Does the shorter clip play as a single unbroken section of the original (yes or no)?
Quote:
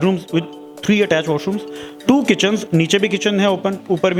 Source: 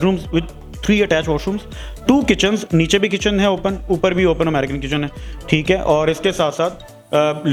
yes